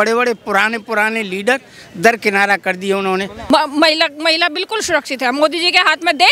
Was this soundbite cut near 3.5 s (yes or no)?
yes